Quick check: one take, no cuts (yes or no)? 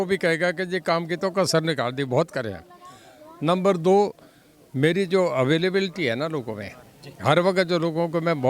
yes